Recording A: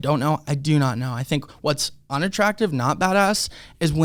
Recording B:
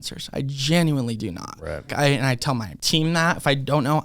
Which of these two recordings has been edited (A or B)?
B